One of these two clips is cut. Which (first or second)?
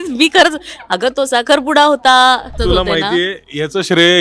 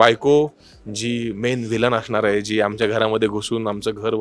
first